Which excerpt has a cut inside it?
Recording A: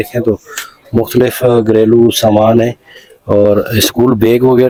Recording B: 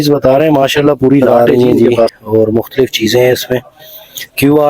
B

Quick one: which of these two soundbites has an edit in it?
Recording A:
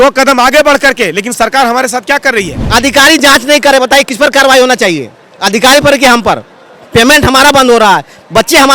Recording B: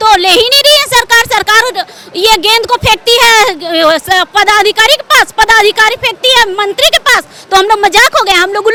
A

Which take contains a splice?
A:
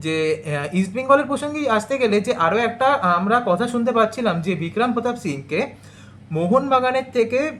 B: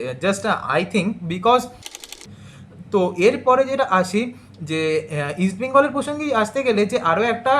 B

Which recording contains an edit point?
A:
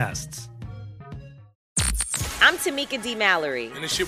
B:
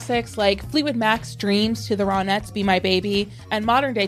A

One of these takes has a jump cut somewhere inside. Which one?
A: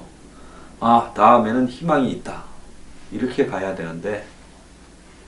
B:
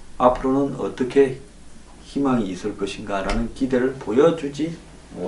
A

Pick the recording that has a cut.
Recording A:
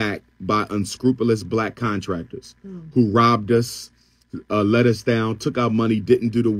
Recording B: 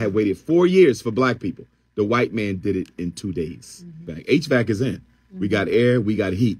B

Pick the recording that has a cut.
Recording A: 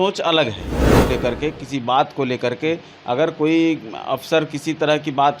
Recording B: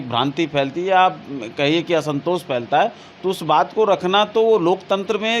A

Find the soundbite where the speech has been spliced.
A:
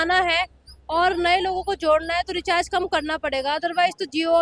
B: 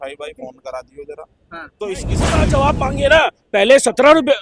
B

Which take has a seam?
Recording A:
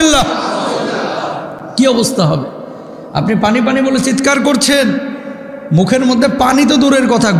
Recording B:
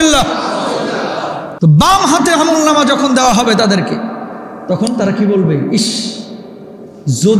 B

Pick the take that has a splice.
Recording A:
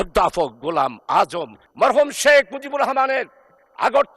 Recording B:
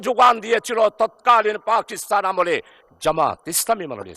A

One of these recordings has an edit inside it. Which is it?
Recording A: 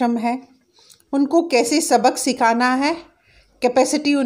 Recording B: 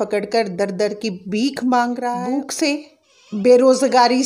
B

